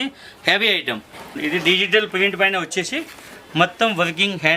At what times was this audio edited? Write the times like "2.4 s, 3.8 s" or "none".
1.4 s